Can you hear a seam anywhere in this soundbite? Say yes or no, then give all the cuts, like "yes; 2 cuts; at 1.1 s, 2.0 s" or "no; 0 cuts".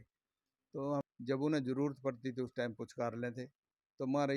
yes; 1 cut; at 1.0 s